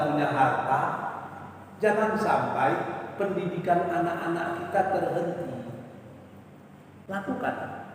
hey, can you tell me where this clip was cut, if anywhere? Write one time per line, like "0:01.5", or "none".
0:07.0